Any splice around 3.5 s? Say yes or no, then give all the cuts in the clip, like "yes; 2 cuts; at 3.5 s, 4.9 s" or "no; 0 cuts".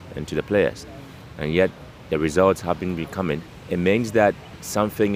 yes; 1 cut; at 3.5 s